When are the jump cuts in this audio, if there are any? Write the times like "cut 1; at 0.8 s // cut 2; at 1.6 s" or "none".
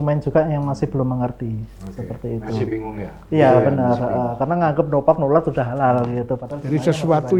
none